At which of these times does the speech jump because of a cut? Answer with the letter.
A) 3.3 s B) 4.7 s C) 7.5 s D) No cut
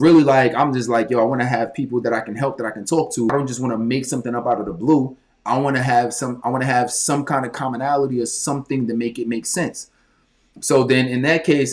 A